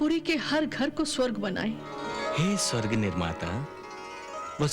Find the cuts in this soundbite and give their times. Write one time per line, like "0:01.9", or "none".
0:02.0